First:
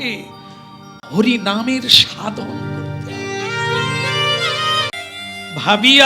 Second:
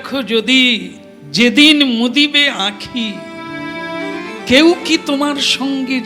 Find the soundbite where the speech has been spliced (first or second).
first